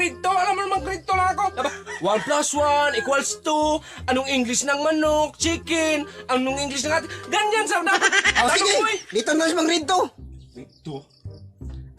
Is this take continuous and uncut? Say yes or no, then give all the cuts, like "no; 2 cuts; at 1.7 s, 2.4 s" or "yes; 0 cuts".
yes; 0 cuts